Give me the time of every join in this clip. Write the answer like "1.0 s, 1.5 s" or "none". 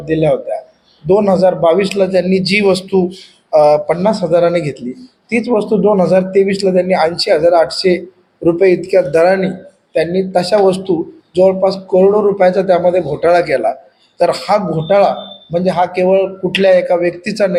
none